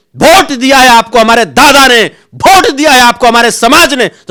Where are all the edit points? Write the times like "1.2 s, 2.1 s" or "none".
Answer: none